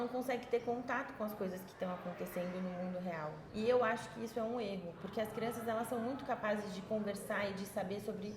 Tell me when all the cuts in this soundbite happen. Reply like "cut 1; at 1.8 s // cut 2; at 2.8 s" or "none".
cut 1; at 3.4 s